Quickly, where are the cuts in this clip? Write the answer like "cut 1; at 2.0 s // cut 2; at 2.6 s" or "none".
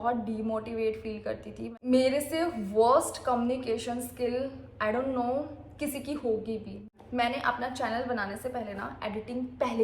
cut 1; at 1.7 s // cut 2; at 6.8 s